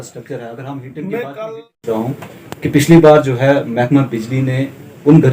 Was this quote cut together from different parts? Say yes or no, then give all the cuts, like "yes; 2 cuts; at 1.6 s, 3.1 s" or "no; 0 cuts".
yes; 1 cut; at 1.8 s